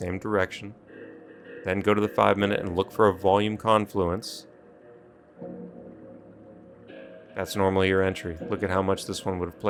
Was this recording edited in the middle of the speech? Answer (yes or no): no